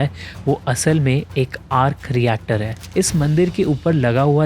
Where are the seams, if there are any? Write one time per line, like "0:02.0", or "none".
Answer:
0:02.7